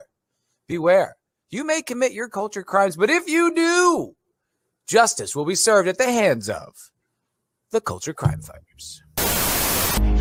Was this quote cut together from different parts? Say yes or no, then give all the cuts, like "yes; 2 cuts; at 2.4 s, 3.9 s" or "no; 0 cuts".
no; 0 cuts